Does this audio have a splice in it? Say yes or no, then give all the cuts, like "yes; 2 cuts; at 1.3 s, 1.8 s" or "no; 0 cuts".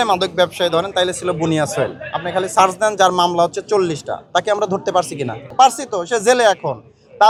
no; 0 cuts